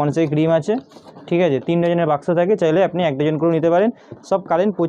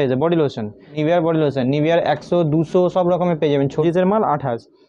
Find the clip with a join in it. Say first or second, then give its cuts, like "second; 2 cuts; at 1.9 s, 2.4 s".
second; 2 cuts; at 0.9 s, 3.8 s